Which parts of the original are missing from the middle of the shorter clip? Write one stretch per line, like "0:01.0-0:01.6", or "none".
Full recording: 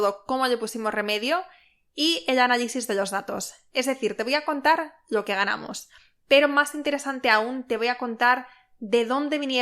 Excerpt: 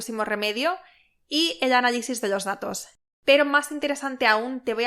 0:03.6-0:05.9